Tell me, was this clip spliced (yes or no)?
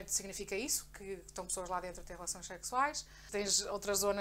yes